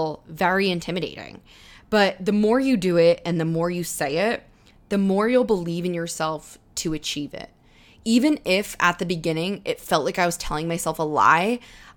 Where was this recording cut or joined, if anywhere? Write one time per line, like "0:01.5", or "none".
none